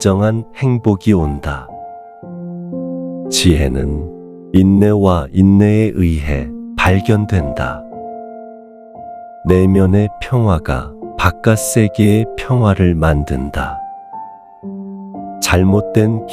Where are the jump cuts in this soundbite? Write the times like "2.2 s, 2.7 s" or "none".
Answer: 14.0 s, 15.5 s